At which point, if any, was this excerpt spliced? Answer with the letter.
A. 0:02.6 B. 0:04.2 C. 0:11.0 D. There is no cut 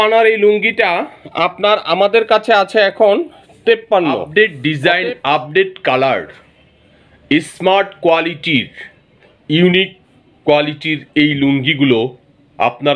B